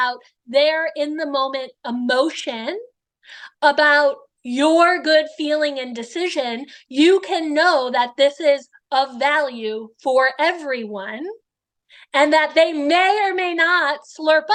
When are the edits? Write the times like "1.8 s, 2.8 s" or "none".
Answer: none